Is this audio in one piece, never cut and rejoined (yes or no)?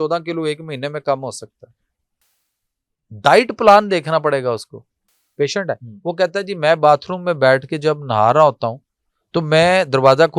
no